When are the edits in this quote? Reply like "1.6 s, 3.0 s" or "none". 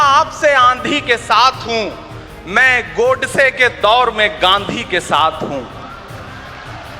none